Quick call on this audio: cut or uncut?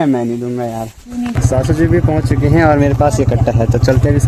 cut